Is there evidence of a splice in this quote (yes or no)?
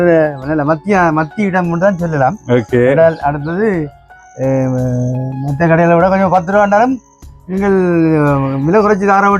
no